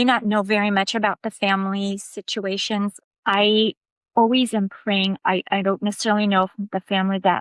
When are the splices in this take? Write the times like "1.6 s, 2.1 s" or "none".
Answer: 3.0 s